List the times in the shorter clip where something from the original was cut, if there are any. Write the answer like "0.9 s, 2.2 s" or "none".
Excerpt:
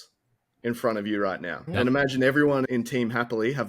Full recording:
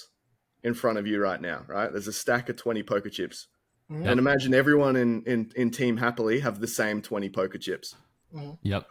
1.5 s, 2.7 s